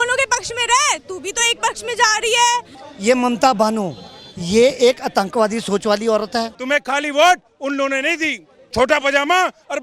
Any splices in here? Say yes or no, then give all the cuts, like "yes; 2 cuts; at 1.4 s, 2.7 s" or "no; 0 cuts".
yes; 3 cuts; at 2.8 s, 6.6 s, 8.5 s